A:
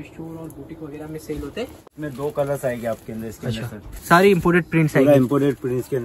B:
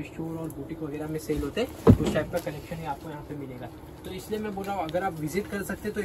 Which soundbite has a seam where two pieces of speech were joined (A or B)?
A